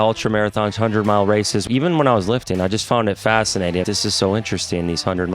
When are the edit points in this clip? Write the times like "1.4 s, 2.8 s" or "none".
1.6 s, 3.8 s

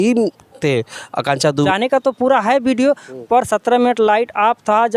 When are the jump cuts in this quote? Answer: 1.7 s

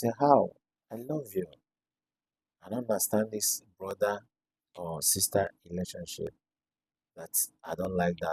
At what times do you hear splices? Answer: none

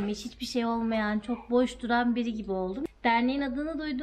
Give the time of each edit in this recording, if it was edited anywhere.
2.8 s

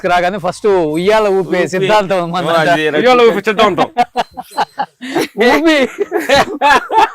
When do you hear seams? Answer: none

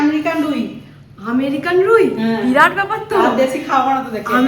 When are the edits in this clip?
none

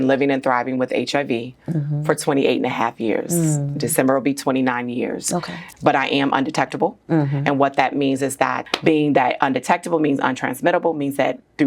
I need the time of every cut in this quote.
5.6 s, 8.6 s

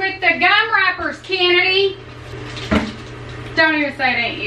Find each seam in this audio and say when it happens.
2.3 s

